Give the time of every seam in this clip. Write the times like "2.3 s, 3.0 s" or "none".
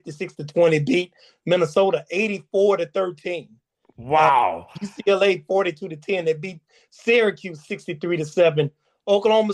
none